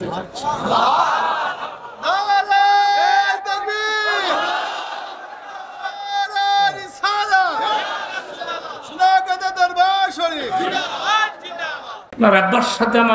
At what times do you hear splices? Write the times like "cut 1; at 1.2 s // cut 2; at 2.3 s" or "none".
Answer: cut 1; at 12.0 s